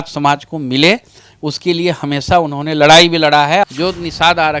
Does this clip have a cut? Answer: yes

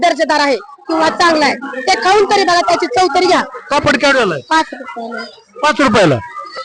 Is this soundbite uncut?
no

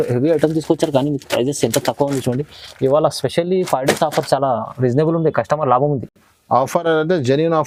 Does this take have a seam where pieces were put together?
no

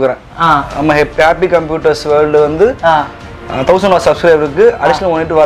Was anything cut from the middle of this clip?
no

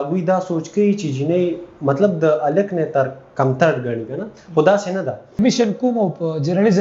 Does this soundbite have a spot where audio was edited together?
yes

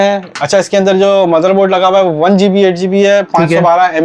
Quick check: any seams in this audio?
no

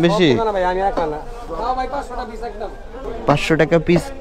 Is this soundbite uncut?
no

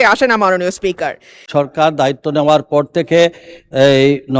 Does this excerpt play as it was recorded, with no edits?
no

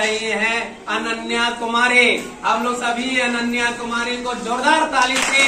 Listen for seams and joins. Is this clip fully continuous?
yes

